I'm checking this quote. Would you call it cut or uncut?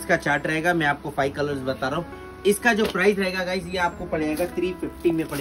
uncut